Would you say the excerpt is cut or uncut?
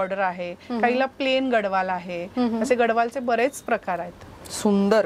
uncut